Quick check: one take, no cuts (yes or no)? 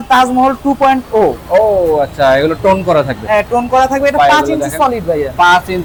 yes